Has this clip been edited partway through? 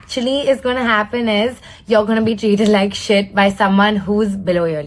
yes; 1 cut; at 2.2 s

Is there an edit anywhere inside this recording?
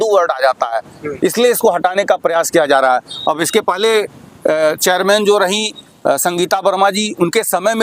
no; 0 cuts

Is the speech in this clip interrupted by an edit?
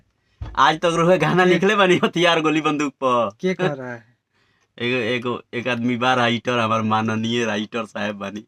no; 0 cuts

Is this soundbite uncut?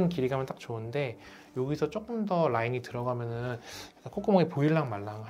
yes; 0 cuts

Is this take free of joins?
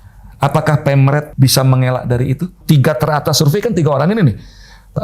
no; 2 cuts; at 1.3 s, 2.6 s

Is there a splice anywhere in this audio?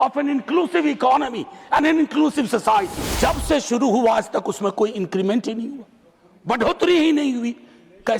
yes; 1 cut; at 3.0 s

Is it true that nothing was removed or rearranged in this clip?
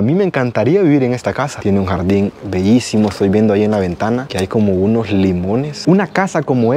no; 2 cuts; at 1.5 s, 5.7 s

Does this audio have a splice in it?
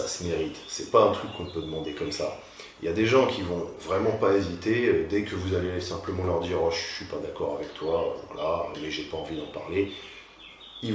no; 0 cuts

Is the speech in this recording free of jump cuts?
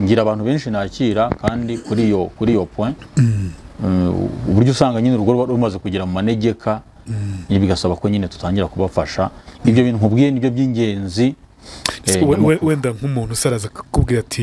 yes; 0 cuts

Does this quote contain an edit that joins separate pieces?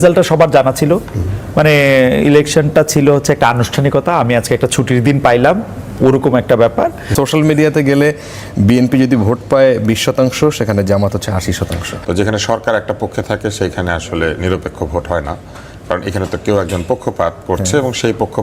yes; 2 cuts; at 7.1 s, 11.9 s

